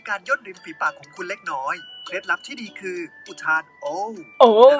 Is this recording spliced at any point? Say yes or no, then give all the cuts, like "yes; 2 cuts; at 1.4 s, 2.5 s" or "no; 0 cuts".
no; 0 cuts